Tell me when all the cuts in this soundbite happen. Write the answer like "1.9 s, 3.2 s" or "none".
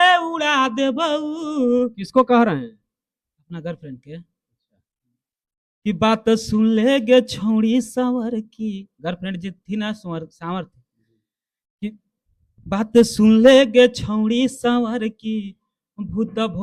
none